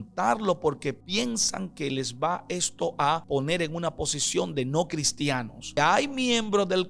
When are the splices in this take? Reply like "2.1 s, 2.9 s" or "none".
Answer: 1.0 s, 3.2 s, 5.8 s